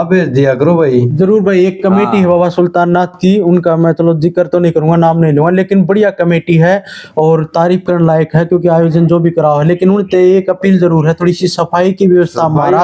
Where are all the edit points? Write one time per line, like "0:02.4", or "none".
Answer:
none